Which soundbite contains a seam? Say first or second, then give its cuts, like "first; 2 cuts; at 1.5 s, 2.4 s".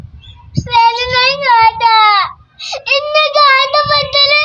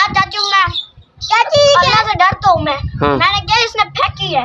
second; 1 cut; at 2.9 s